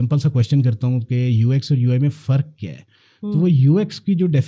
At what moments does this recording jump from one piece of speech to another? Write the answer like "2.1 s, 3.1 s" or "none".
none